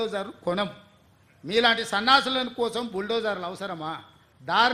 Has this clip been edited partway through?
no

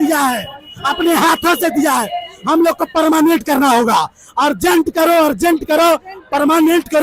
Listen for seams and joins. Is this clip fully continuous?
yes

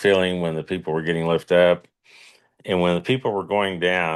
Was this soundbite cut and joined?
no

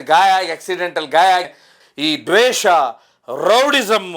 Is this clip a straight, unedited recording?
no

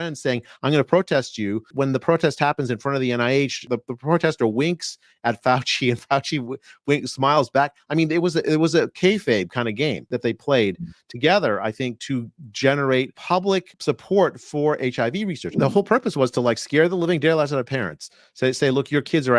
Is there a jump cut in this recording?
yes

